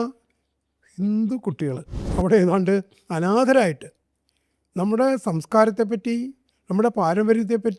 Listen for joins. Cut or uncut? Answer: cut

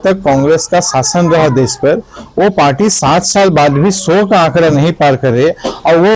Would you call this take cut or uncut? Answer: uncut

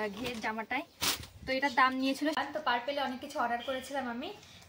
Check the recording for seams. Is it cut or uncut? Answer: cut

